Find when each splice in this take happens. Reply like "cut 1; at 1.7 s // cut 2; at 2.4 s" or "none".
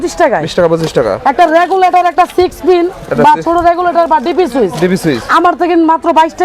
none